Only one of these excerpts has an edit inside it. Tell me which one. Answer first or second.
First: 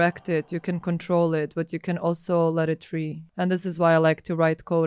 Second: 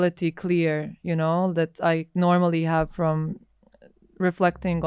first